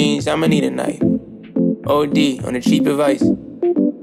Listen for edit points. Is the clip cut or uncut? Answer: uncut